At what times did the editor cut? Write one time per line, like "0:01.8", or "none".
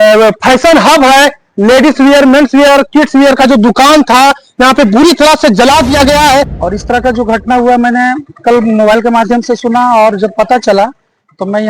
0:06.6